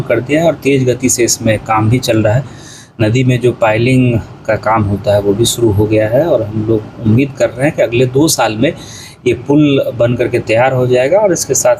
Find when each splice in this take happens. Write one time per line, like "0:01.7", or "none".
none